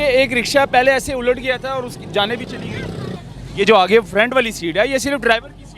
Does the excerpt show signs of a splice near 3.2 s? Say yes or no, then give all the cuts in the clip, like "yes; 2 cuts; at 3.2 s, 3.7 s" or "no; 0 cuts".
yes; 1 cut; at 3.2 s